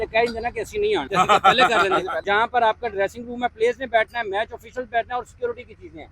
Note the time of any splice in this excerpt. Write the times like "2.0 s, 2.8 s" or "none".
1.1 s, 2.2 s